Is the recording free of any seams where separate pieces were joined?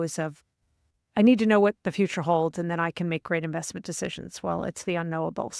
yes; 0 cuts

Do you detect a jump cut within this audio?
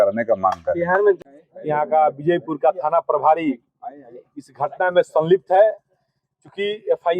yes; 1 cut; at 1.2 s

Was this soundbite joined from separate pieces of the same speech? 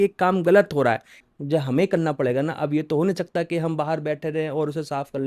yes; 1 cut; at 1.1 s

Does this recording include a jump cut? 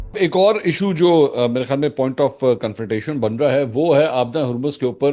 no; 0 cuts

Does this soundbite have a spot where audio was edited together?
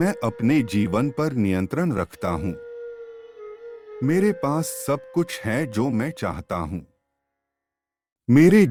no; 0 cuts

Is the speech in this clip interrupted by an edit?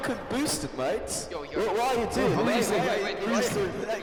no; 0 cuts

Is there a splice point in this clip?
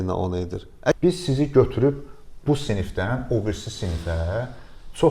yes; 1 cut; at 0.9 s

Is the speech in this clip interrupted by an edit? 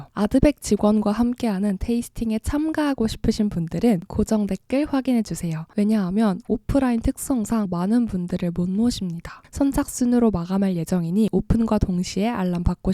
yes; 1 cut; at 7.7 s

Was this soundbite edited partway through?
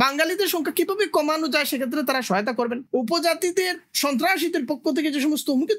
yes; 1 cut; at 2.8 s

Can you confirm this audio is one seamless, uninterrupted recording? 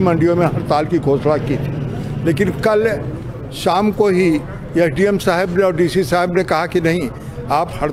yes; 0 cuts

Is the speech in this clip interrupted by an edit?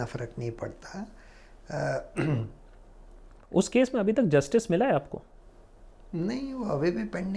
no; 0 cuts

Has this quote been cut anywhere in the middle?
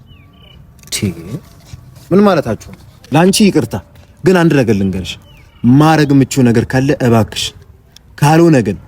yes; 1 cut; at 3.0 s

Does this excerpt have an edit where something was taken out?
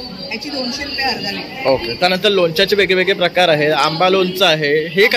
no; 0 cuts

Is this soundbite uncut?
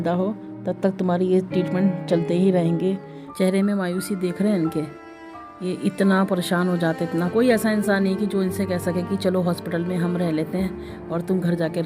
no; 2 cuts; at 3.2 s, 7.3 s

